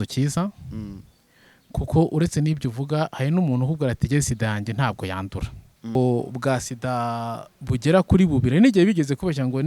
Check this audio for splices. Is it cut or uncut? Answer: cut